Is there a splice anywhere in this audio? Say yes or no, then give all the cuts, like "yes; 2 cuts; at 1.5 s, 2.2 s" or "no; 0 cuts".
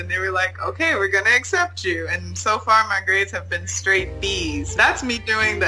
yes; 1 cut; at 4.7 s